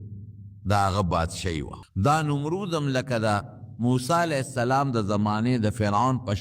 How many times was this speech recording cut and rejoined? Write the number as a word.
one